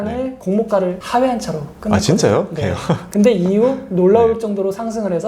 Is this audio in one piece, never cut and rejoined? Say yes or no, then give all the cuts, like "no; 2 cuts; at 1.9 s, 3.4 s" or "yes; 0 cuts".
yes; 0 cuts